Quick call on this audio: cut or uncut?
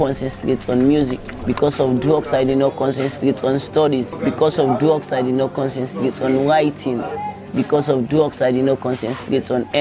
uncut